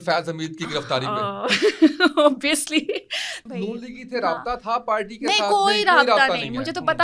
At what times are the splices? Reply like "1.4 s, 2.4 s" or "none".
3.3 s